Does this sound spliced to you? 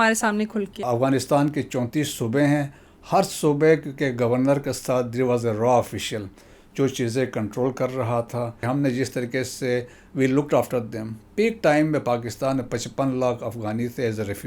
yes; 2 cuts; at 0.9 s, 8.6 s

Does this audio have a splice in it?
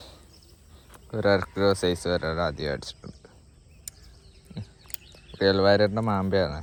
no; 0 cuts

